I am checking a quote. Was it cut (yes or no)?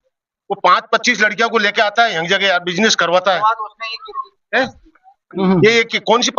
no